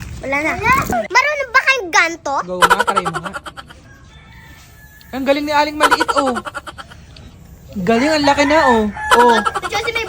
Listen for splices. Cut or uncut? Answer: cut